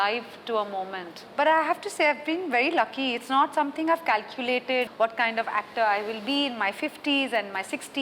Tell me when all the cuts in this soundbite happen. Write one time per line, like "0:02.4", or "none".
0:01.3
0:04.9

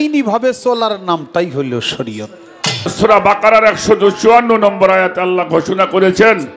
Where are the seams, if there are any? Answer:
0:02.9

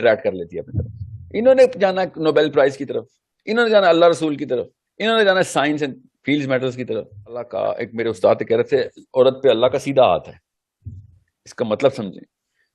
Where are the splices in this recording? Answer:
0:07.5

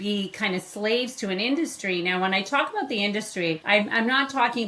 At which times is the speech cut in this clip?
0:03.6

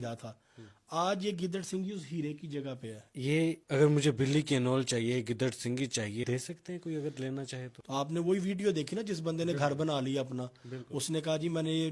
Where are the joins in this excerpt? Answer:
0:03.2
0:06.2
0:07.8

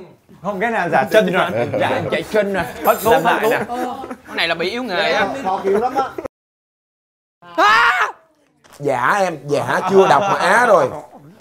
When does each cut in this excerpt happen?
none

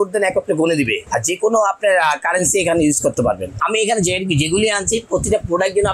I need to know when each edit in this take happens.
0:01.0
0:03.5

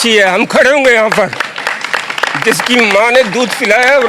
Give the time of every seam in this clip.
none

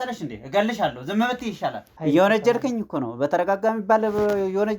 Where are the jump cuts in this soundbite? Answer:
0:01.9

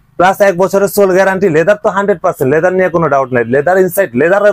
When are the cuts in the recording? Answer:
none

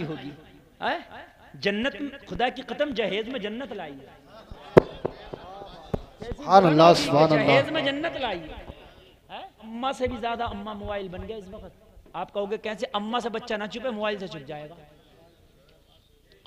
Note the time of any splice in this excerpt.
0:09.7

